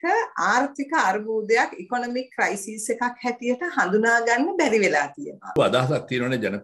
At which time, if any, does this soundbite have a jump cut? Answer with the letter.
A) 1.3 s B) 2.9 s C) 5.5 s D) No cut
C